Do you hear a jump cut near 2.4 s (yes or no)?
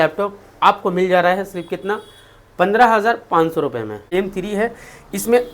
no